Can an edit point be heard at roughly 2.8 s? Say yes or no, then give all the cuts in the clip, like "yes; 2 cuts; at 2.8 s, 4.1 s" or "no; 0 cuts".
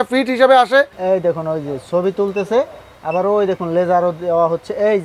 no; 1 cut; at 0.9 s